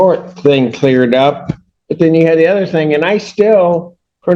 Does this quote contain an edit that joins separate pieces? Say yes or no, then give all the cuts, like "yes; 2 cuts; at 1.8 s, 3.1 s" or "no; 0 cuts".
no; 0 cuts